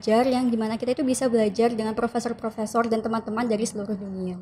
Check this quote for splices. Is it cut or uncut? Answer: uncut